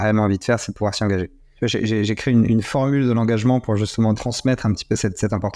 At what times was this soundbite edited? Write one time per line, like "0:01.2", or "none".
0:01.4
0:04.2